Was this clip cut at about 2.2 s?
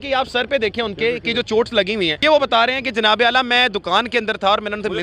yes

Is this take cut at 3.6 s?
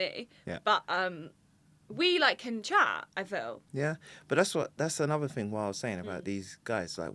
yes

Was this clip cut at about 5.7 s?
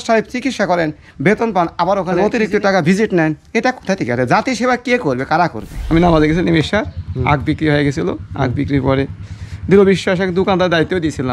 yes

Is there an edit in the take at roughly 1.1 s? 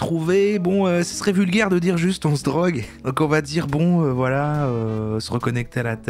no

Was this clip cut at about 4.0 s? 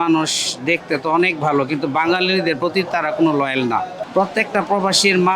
yes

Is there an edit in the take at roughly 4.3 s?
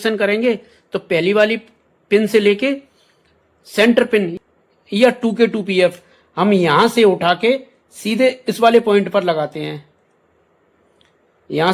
yes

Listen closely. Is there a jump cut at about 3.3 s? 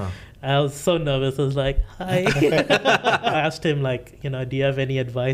yes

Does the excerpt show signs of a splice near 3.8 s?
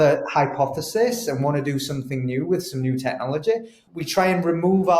yes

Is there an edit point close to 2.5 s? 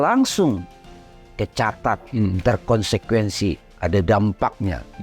no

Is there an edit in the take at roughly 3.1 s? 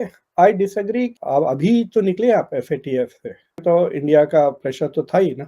no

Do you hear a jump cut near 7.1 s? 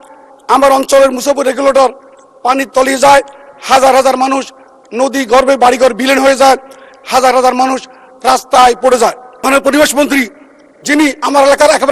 no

